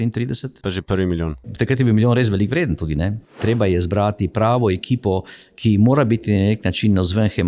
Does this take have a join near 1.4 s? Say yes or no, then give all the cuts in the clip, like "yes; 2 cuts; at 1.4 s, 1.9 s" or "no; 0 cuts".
yes; 2 cuts; at 1.4 s, 3.4 s